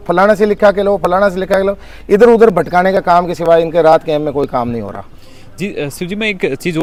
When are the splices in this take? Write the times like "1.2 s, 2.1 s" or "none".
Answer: none